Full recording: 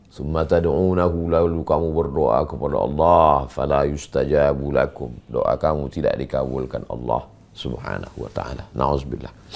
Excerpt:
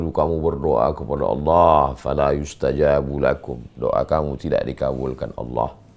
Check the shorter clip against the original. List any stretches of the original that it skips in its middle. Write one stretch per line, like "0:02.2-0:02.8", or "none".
none